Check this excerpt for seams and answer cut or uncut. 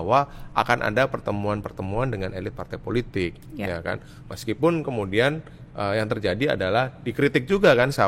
uncut